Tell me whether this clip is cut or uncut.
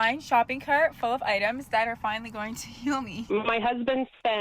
cut